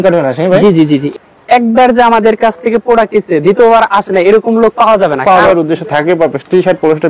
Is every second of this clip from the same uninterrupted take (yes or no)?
no